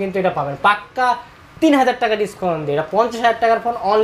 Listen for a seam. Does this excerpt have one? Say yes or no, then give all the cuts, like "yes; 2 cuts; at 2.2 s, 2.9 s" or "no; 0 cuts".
no; 0 cuts